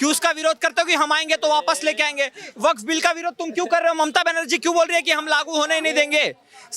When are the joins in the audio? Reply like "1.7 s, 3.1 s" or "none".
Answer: none

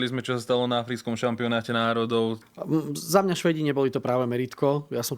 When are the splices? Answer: 2.4 s

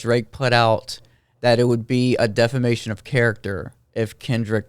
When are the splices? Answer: none

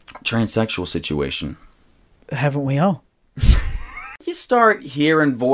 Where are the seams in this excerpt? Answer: 4.2 s

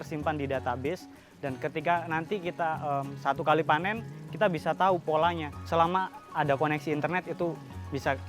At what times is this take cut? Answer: 5.7 s

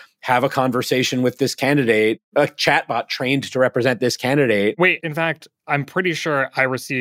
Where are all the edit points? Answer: 2.3 s, 4.9 s

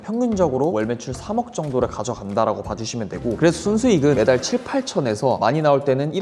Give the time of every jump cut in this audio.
none

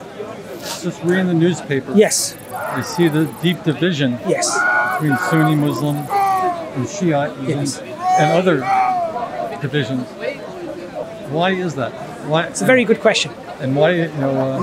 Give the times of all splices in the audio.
11.0 s

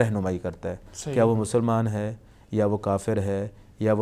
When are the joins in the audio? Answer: none

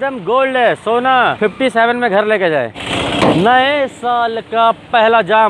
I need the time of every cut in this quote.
1.3 s, 2.8 s

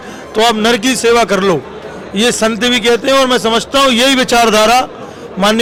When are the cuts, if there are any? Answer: none

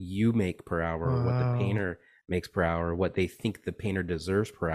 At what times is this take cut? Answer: none

